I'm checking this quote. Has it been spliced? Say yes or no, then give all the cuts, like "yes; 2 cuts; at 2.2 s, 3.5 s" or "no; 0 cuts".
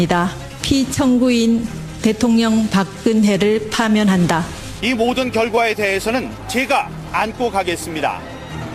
no; 0 cuts